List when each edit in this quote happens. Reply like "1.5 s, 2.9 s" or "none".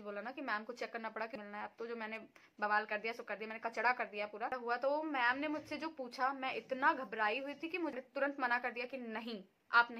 1.3 s, 4.5 s, 7.9 s